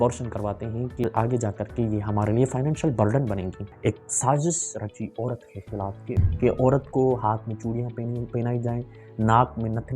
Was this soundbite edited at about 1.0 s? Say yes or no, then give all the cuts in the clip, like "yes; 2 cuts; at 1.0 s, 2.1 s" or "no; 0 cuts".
yes; 3 cuts; at 1.0 s, 3.6 s, 6.3 s